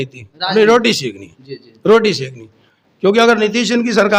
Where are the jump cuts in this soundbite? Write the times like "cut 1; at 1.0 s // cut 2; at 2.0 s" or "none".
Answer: none